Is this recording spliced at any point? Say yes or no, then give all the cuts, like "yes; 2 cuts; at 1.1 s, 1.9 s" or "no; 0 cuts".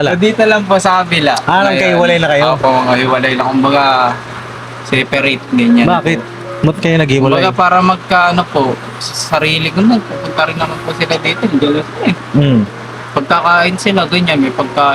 no; 0 cuts